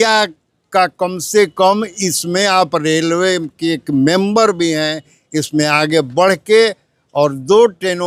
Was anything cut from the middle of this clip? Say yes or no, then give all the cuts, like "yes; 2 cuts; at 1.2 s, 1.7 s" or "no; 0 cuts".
no; 0 cuts